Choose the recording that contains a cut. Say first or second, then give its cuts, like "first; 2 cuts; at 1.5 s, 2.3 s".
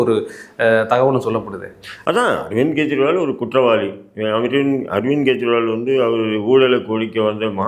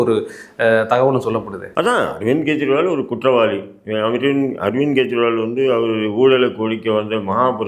second; 1 cut; at 1.6 s